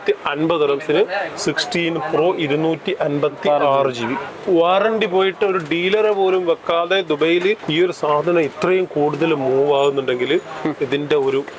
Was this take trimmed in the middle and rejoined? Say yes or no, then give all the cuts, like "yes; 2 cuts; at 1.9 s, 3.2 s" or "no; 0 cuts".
yes; 2 cuts; at 4.3 s, 7.6 s